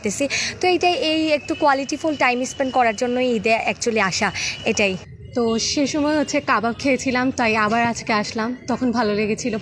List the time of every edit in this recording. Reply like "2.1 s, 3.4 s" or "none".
5.1 s